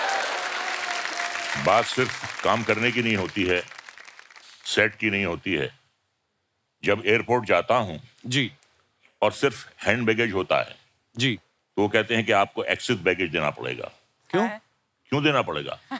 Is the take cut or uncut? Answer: uncut